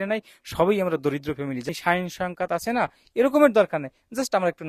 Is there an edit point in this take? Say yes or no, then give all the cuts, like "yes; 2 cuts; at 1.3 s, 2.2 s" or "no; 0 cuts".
yes; 1 cut; at 1.7 s